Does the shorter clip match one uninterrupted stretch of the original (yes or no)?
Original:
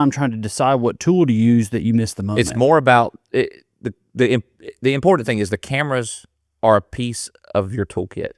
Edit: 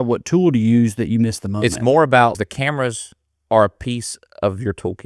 no